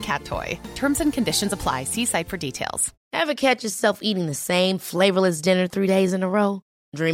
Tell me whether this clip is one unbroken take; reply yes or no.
no